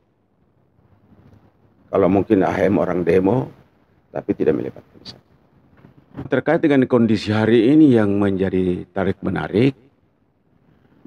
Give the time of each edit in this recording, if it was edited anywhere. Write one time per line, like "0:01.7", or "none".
0:06.3